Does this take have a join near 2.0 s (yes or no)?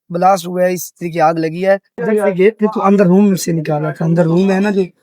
yes